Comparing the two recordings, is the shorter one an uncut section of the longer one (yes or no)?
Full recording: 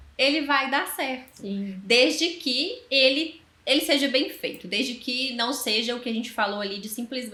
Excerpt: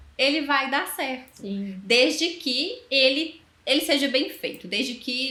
yes